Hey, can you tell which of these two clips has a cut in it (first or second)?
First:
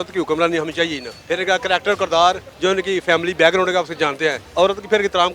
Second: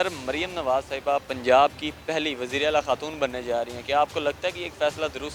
first